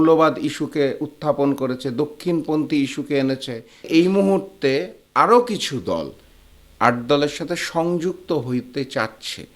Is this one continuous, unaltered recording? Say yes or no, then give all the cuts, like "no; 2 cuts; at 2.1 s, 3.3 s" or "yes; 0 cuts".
no; 1 cut; at 3.9 s